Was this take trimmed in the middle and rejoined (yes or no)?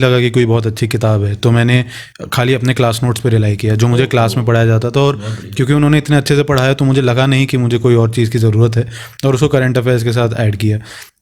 no